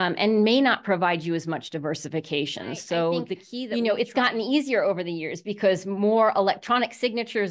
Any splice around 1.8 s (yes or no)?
no